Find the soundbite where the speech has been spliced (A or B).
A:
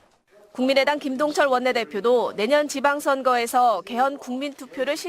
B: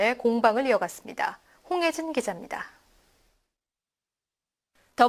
A